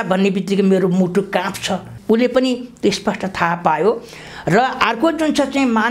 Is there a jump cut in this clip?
yes; 1 cut; at 1.9 s

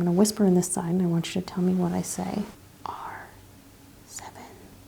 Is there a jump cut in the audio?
yes; 1 cut; at 2.6 s

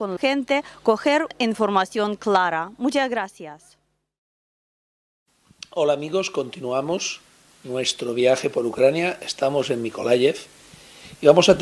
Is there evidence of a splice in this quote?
yes; 1 cut; at 9.5 s

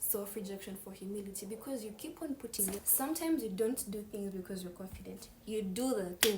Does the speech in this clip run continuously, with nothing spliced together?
no; 1 cut; at 2.8 s

